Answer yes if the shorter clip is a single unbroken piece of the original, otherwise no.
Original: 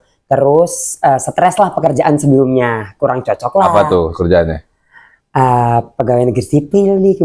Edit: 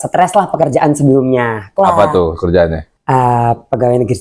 no